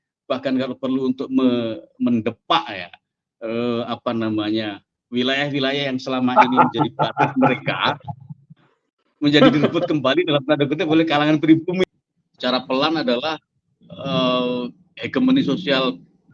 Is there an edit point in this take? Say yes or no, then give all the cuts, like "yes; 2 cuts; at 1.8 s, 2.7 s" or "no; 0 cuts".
yes; 1 cut; at 11.8 s